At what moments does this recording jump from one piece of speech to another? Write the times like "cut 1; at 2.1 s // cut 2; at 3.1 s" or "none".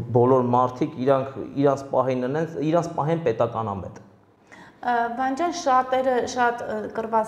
none